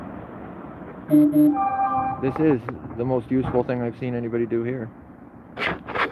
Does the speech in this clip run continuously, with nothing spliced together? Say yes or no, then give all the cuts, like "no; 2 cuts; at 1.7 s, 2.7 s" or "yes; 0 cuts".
yes; 0 cuts